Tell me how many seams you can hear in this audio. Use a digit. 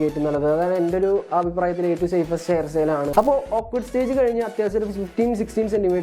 1